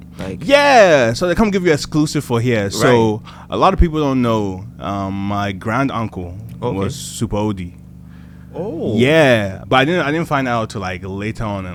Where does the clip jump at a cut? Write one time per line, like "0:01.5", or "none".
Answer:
none

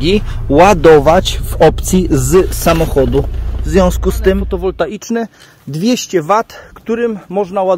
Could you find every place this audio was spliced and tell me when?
0:04.5

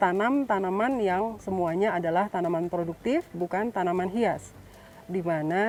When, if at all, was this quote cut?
none

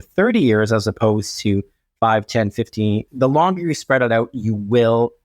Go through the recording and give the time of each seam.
0:03.1

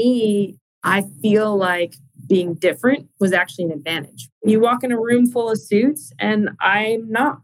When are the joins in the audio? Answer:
0:04.4

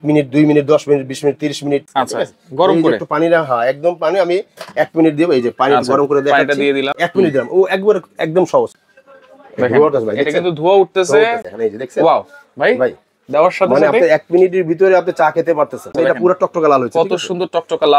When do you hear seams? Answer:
0:01.9
0:06.9
0:08.8
0:11.4
0:15.9

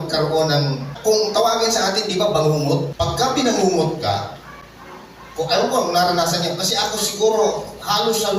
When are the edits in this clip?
0:00.9
0:03.2

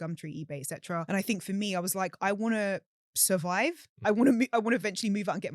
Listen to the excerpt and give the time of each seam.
0:01.1

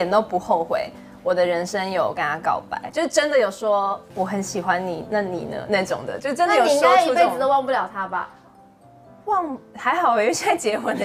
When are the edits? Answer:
0:02.9
0:04.0

